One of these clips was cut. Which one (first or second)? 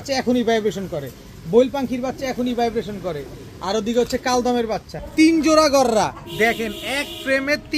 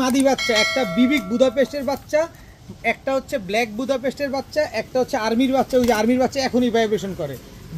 first